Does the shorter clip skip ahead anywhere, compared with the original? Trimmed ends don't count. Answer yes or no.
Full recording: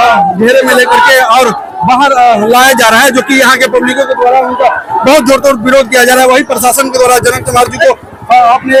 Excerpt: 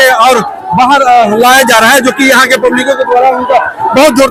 no